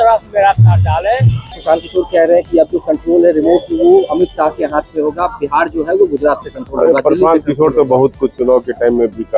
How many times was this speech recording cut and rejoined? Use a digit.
1